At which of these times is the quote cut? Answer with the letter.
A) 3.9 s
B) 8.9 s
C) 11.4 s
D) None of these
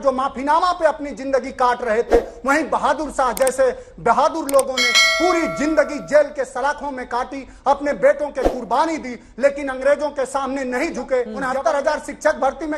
C